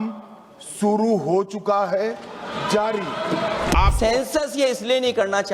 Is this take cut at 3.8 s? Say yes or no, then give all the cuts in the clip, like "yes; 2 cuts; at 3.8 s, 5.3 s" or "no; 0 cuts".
yes; 1 cut; at 3.8 s